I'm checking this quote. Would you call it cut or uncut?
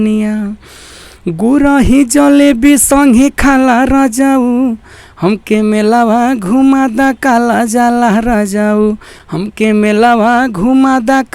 uncut